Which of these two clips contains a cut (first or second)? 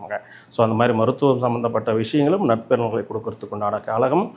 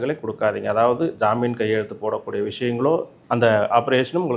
second